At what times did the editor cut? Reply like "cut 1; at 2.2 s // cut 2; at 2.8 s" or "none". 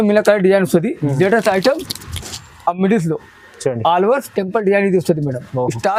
none